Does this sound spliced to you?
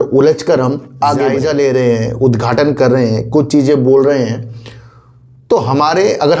yes; 1 cut; at 1.4 s

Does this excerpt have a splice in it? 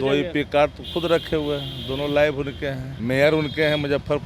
yes; 1 cut; at 2.9 s

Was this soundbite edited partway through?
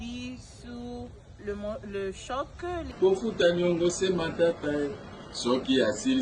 yes; 1 cut; at 2.9 s

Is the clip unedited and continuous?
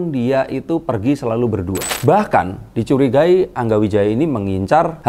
no; 1 cut; at 1.9 s

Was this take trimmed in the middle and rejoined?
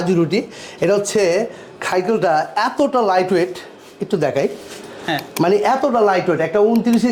no; 0 cuts

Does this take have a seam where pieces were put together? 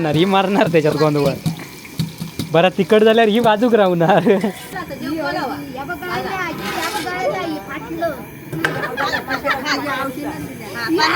yes; 1 cut; at 4.8 s

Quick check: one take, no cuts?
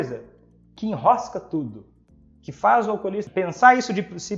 no; 1 cut; at 3.2 s

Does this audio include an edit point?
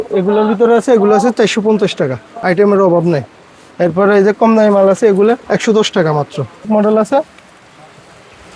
yes; 2 cuts; at 2.3 s, 6.7 s

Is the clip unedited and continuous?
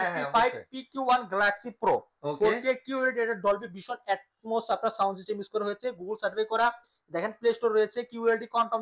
yes; 0 cuts

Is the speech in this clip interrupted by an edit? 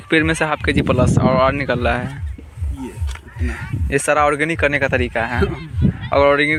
no; 0 cuts

